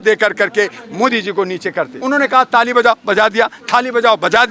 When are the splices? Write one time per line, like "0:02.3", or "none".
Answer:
0:01.9